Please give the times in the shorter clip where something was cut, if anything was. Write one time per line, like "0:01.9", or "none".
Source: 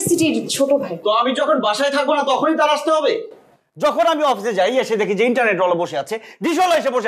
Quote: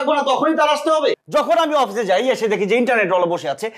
0:01.2